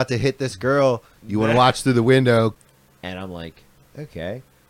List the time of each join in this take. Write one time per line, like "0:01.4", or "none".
0:02.6